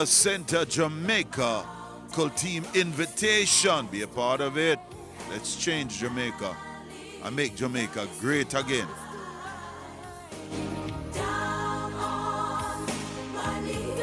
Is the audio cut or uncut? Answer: cut